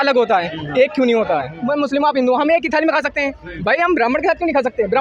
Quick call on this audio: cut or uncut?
cut